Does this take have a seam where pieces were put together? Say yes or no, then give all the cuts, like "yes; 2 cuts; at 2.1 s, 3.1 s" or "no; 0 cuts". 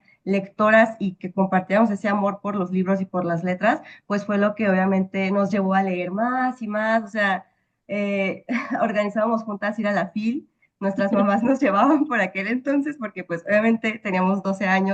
no; 0 cuts